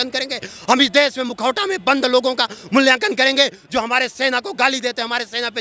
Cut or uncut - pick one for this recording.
uncut